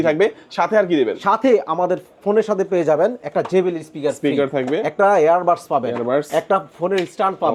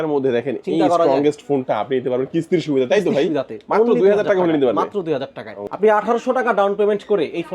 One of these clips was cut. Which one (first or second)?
second